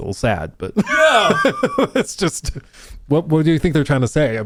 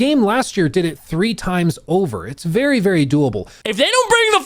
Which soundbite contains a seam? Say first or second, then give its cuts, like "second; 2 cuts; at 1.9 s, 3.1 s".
second; 1 cut; at 3.5 s